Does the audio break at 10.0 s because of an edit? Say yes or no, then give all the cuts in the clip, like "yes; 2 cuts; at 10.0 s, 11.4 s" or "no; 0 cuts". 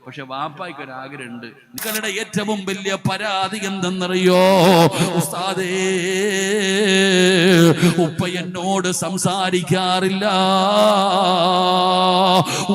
no; 1 cut; at 1.8 s